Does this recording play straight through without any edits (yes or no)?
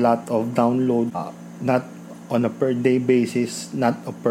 no